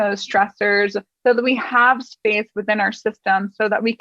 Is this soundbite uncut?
yes; 0 cuts

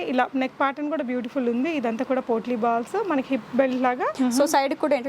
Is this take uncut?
no; 1 cut; at 4.1 s

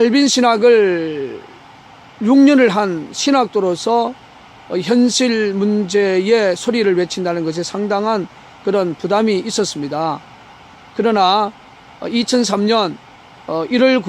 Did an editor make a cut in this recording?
yes; 1 cut; at 4.2 s

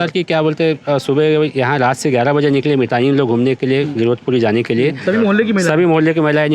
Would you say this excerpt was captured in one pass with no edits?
yes; 0 cuts

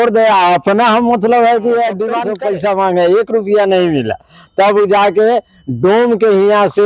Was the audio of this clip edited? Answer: yes; 1 cut; at 2.3 s

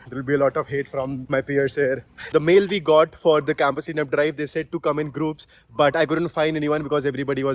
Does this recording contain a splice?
yes; 2 cuts; at 1.2 s, 2.1 s

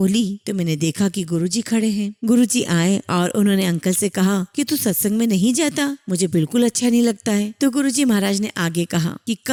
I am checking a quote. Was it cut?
no; 0 cuts

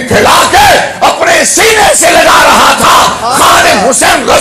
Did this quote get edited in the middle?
no; 0 cuts

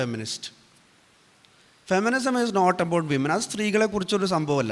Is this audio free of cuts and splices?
yes; 0 cuts

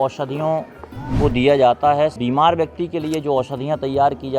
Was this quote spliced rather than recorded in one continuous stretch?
yes; 1 cut; at 2.1 s

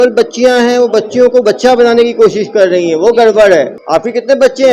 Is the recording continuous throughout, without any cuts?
no; 1 cut; at 3.8 s

